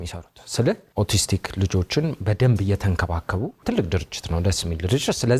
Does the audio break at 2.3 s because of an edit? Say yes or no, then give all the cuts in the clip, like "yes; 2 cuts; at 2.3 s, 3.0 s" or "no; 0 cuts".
no; 2 cuts; at 0.9 s, 3.6 s